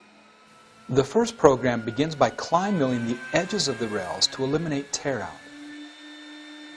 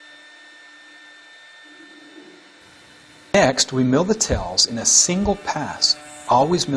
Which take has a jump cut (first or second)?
first